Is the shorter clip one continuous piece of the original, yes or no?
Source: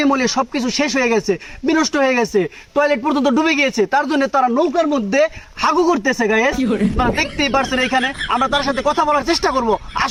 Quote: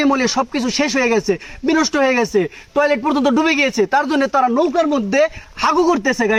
yes